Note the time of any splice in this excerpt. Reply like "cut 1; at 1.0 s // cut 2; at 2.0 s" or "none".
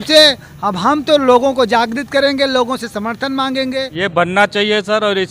cut 1; at 3.9 s